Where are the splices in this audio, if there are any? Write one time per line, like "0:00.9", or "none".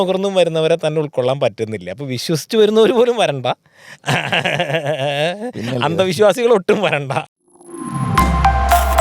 0:07.2